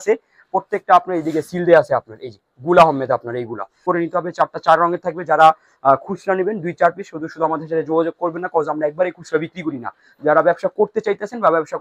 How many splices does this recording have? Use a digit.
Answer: 1